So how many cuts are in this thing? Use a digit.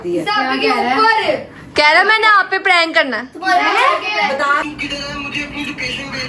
1